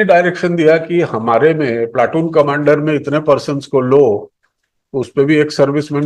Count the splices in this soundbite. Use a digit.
0